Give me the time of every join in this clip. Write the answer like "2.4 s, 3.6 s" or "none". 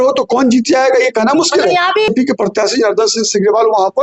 2.1 s